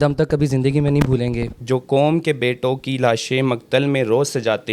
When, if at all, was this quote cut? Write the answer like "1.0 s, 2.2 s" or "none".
1.5 s